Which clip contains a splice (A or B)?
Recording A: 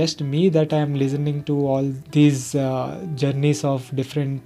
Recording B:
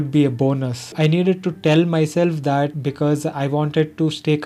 B